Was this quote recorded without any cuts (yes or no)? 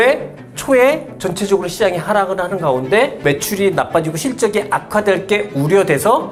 yes